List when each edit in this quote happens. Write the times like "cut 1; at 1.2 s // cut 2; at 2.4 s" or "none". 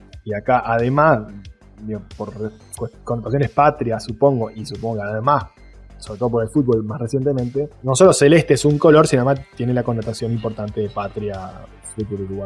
none

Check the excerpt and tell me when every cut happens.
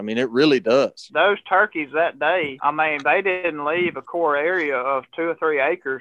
cut 1; at 1.0 s // cut 2; at 2.5 s // cut 3; at 3.4 s

